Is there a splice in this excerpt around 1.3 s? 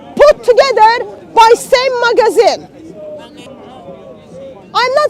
no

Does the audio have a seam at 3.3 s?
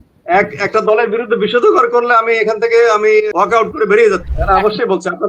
yes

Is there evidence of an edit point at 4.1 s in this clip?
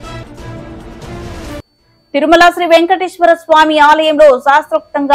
no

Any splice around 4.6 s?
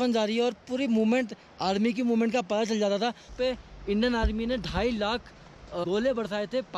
no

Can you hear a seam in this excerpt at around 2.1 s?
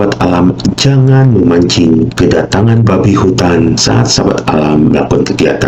yes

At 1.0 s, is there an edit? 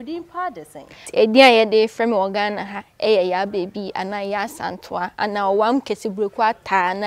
yes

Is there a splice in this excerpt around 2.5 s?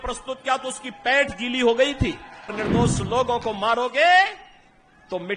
yes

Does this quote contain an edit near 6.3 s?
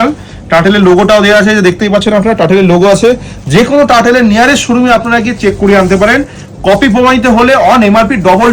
no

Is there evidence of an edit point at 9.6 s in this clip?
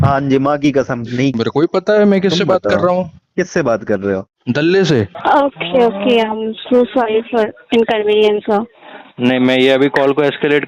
no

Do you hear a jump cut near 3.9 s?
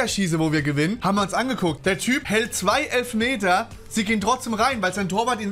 no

